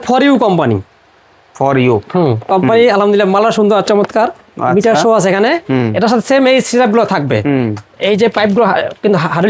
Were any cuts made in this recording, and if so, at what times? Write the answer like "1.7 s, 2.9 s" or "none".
none